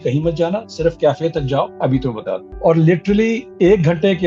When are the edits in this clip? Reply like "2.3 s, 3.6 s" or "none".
1.9 s, 3.5 s